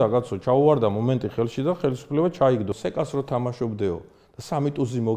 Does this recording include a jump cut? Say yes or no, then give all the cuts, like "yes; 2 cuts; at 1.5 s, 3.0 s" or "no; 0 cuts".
yes; 1 cut; at 2.7 s